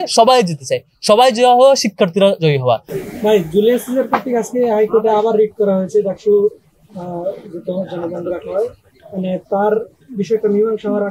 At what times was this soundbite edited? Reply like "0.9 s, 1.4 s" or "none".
2.9 s